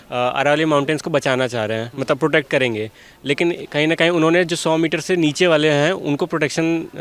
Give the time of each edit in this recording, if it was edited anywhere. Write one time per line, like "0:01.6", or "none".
none